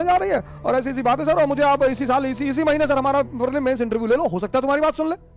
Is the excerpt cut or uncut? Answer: uncut